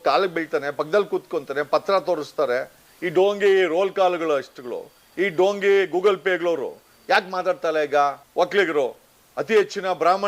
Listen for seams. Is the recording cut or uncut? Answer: cut